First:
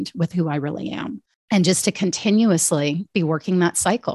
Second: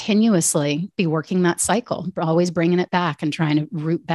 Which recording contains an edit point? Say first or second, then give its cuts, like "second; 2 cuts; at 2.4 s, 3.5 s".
first; 1 cut; at 1.2 s